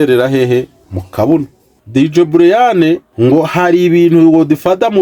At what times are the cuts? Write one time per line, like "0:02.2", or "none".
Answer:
0:01.9
0:03.1